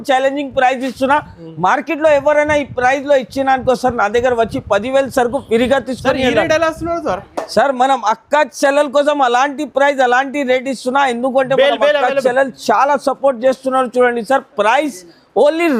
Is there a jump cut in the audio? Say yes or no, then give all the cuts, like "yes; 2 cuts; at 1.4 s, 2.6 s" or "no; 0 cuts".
no; 0 cuts